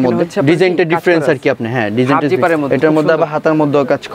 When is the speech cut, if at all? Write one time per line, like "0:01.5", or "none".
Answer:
none